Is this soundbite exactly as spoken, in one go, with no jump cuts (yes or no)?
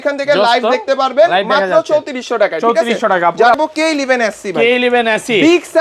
no